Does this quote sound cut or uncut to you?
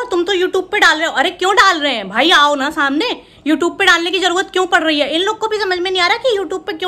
uncut